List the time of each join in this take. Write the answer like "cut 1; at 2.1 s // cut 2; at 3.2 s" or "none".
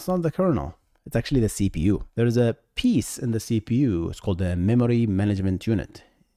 cut 1; at 2.1 s